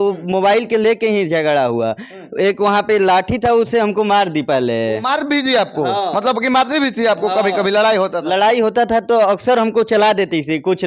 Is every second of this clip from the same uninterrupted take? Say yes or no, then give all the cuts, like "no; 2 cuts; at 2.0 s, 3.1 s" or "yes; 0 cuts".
yes; 0 cuts